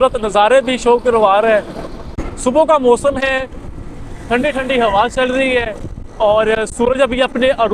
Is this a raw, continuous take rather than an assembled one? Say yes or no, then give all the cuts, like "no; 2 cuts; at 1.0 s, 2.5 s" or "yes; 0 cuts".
yes; 0 cuts